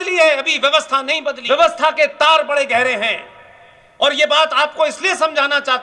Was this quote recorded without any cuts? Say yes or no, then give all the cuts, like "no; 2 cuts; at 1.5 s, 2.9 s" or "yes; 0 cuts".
no; 1 cut; at 1.4 s